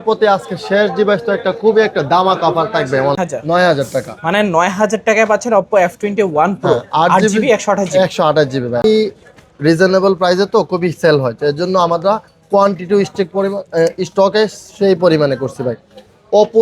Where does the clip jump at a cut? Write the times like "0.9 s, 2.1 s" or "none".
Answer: 3.2 s, 8.8 s

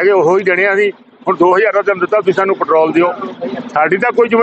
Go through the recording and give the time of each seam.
3.3 s

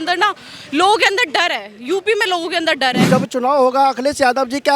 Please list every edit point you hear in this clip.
3.1 s

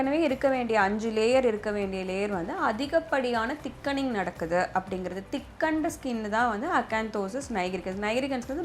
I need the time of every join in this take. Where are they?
none

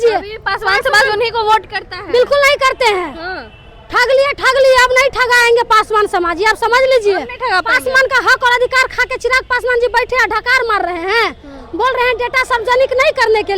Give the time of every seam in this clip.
none

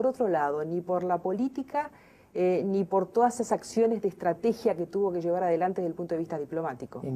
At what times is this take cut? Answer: 2.9 s

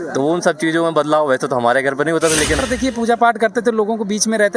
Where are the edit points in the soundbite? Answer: 2.6 s

